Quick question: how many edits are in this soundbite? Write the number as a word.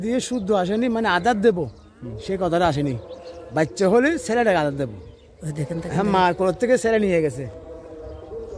zero